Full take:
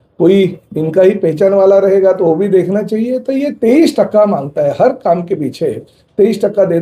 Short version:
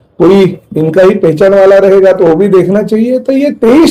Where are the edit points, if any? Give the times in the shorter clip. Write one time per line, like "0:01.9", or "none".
none